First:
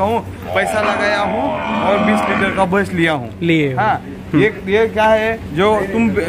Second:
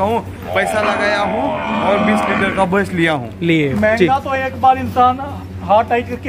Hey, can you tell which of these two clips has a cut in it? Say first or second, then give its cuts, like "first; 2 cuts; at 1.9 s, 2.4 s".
second; 1 cut; at 3.7 s